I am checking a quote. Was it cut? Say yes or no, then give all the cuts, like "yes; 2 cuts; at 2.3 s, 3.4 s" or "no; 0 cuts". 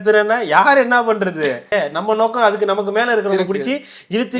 yes; 1 cut; at 1.7 s